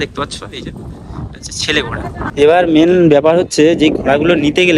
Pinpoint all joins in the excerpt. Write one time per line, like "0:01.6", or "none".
0:02.3